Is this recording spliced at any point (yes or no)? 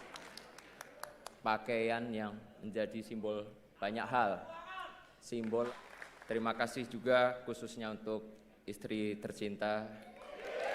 yes